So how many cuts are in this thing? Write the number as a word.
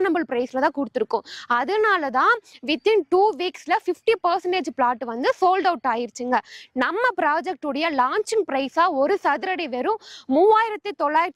zero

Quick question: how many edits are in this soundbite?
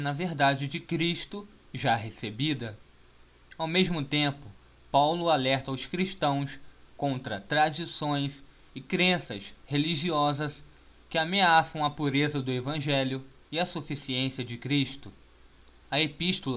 zero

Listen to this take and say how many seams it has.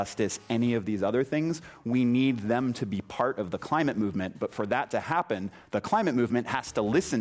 zero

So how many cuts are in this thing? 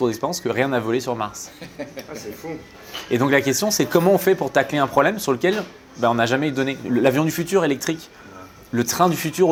zero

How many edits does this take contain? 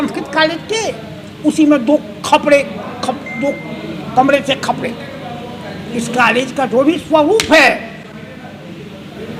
zero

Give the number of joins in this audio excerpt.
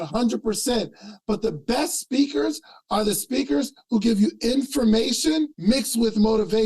one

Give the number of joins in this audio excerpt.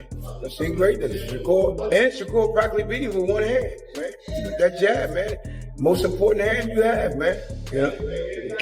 one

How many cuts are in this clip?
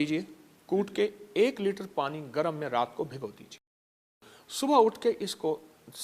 zero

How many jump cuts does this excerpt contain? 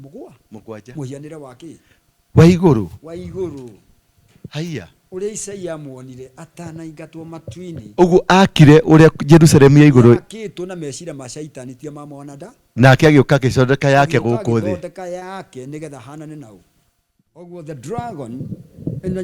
one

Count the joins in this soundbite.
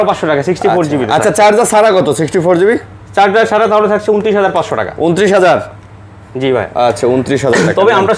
zero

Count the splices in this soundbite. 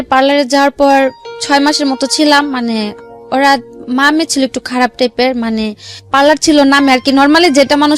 zero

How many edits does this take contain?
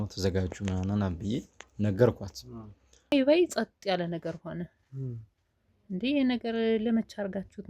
one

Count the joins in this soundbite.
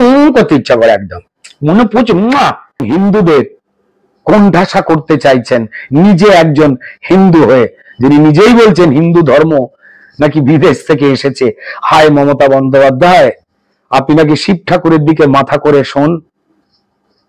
one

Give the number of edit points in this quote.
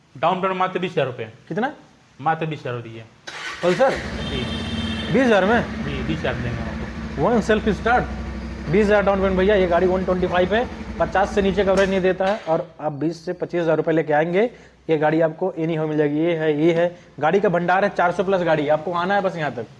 zero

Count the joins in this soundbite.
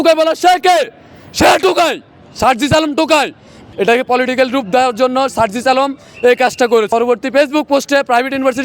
two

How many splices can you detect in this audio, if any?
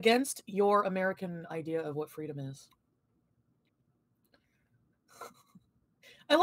zero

